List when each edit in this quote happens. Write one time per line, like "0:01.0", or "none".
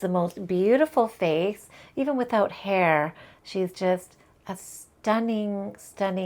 none